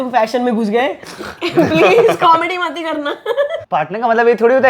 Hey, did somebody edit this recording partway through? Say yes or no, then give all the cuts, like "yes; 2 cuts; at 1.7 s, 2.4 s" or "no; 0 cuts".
yes; 1 cut; at 3.7 s